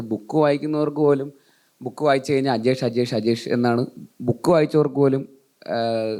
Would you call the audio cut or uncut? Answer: uncut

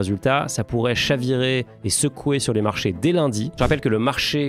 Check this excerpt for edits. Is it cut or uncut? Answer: cut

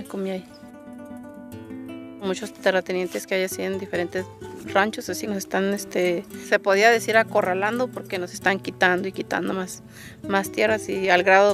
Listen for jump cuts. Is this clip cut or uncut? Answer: cut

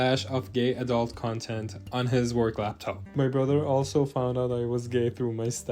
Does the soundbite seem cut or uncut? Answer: cut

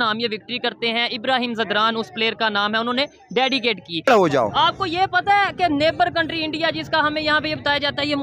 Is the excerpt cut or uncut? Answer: cut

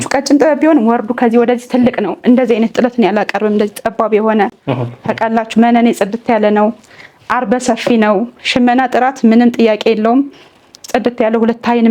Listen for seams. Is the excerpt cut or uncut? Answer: uncut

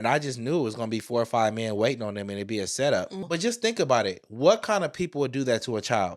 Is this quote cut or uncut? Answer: cut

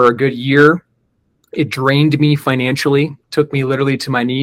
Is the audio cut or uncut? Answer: cut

